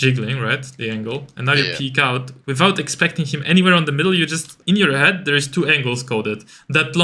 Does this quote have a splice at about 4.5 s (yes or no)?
yes